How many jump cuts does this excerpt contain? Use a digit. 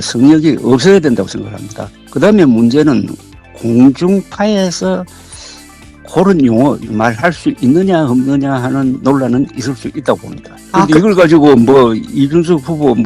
1